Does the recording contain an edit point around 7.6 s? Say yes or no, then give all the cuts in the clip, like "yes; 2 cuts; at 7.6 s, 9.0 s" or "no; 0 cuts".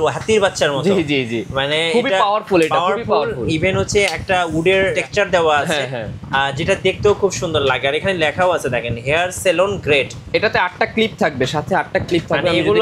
yes; 2 cuts; at 5.0 s, 7.6 s